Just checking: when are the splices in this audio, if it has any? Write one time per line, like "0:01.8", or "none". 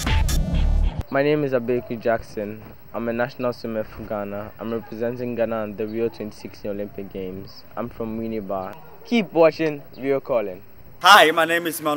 0:01.1